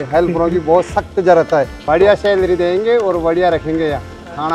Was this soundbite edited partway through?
yes; 1 cut; at 1.8 s

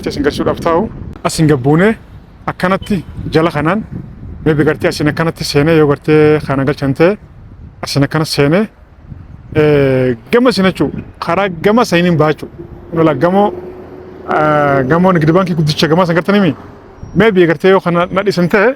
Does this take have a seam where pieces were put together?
yes; 1 cut; at 1.0 s

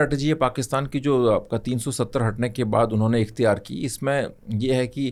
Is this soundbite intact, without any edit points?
yes; 0 cuts

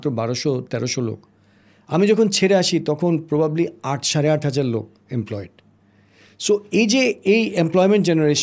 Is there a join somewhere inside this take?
no; 0 cuts

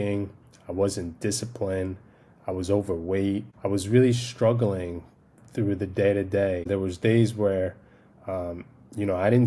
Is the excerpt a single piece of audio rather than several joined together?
no; 2 cuts; at 3.5 s, 6.7 s

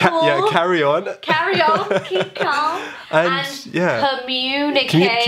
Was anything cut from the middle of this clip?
no; 0 cuts

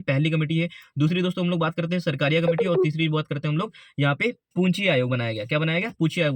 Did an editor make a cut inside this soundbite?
no; 0 cuts

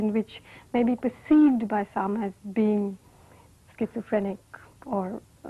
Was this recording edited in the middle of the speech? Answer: no; 0 cuts

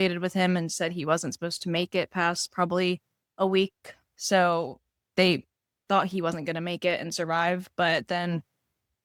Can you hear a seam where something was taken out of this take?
no; 0 cuts

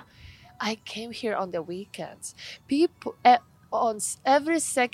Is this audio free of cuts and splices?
yes; 0 cuts

